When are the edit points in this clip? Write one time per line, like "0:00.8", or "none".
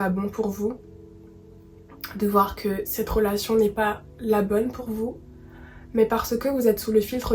none